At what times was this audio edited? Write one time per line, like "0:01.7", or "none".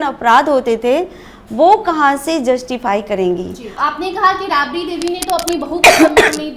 0:03.7